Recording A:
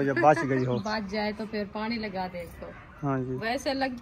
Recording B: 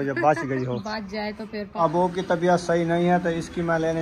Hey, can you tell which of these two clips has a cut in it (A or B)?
B